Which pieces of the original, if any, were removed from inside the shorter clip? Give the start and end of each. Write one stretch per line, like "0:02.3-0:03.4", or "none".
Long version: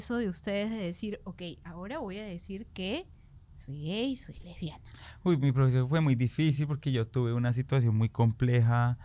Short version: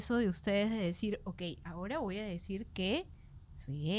none